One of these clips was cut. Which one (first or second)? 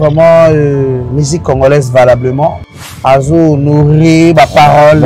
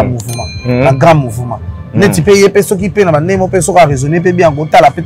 first